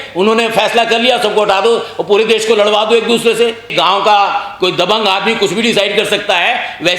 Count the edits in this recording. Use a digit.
1